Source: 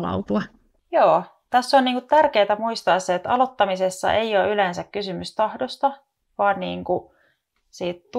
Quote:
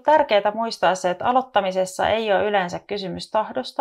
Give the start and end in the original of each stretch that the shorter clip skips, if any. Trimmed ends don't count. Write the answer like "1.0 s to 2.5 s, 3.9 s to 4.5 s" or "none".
none